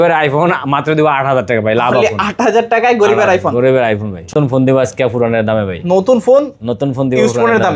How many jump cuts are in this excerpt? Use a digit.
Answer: 1